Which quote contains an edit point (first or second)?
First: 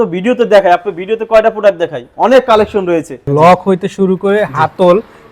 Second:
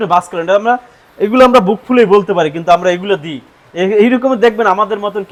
first